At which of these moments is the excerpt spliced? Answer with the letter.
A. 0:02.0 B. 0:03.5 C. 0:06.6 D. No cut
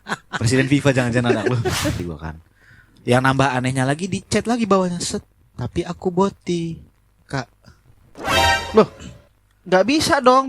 A